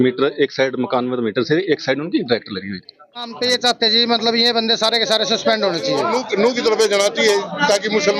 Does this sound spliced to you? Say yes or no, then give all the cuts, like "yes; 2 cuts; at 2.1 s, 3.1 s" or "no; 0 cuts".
yes; 2 cuts; at 3.5 s, 6.2 s